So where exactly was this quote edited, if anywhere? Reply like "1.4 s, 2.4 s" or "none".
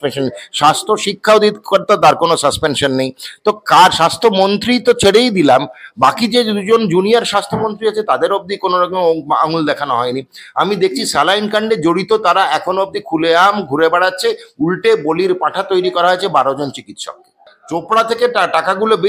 17.5 s

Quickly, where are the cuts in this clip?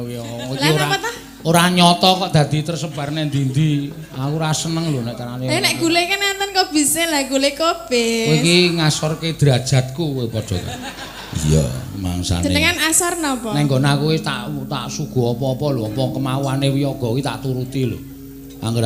none

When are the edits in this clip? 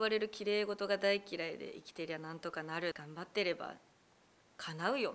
3.0 s

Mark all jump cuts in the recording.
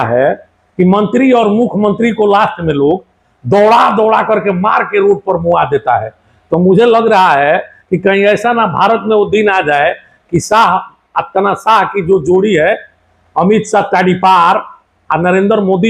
none

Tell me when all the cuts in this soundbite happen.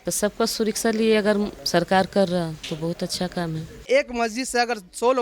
1.6 s, 3.9 s

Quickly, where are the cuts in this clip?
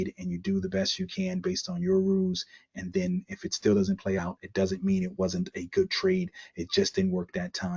4.1 s

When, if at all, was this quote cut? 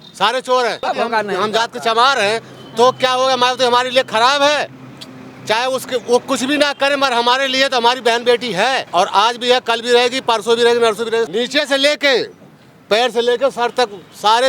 0.9 s, 8.9 s, 11.3 s

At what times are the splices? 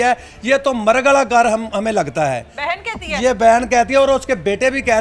none

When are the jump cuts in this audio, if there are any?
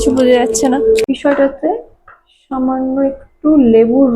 1.0 s

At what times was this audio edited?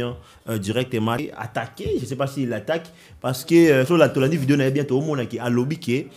1.2 s

